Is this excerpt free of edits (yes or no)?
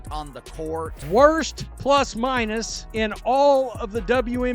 no